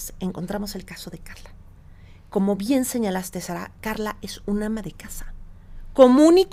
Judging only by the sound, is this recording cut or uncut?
uncut